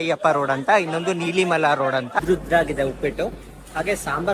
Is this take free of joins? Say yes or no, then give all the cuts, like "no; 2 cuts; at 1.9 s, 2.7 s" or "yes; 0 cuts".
no; 1 cut; at 2.2 s